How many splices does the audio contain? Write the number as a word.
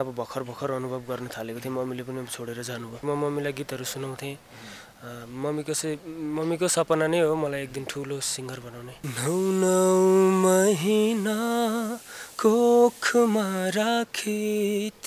two